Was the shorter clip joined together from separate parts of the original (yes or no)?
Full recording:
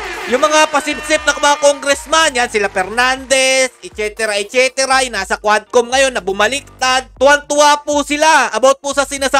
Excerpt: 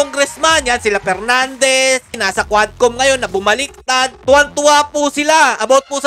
yes